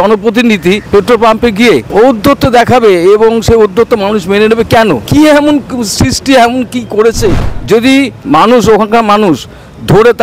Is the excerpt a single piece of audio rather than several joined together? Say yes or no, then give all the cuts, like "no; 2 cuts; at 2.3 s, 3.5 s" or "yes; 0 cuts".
no; 4 cuts; at 0.8 s, 1.9 s, 5.1 s, 7.5 s